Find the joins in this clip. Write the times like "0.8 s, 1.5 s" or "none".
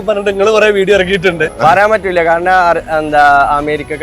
1.4 s